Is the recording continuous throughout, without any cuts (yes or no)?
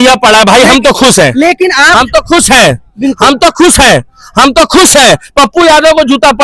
yes